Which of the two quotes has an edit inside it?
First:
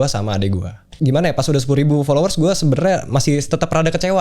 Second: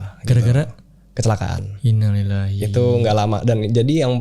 first; 1 cut; at 0.9 s

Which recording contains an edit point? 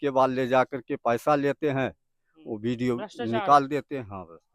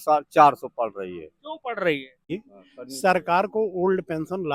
second; 1 cut; at 2.1 s

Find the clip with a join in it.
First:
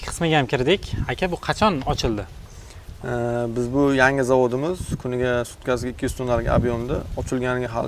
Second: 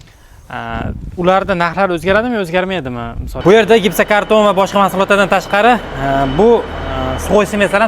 second; 1 cut; at 3.2 s

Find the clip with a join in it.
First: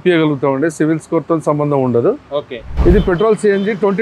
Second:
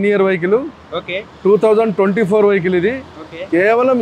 first; 1 cut; at 2.6 s

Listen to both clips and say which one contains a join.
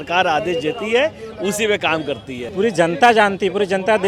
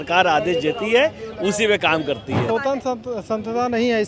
second; 1 cut; at 2.4 s

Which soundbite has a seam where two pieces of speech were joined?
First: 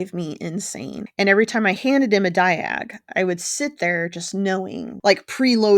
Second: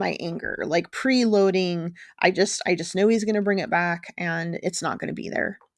first; 2 cuts; at 1.1 s, 4.8 s

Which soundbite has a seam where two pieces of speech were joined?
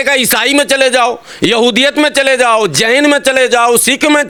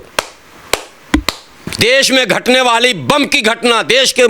second; 1 cut; at 1.7 s

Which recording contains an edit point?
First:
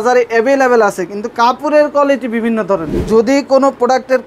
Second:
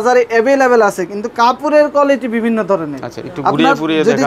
first; 1 cut; at 2.9 s

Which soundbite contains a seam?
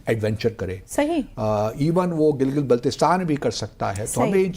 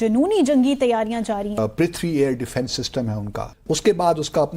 second; 2 cuts; at 1.6 s, 3.4 s

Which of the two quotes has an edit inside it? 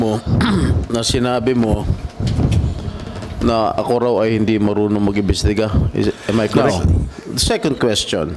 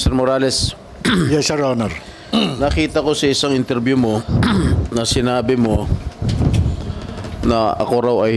first; 1 cut; at 6.5 s

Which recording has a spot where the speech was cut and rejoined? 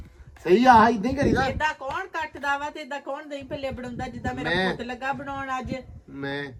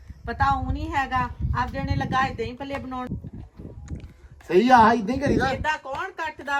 second; 1 cut; at 3.1 s

